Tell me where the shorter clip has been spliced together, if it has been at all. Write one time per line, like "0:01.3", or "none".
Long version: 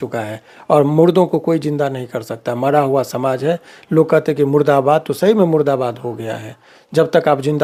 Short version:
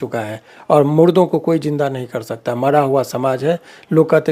none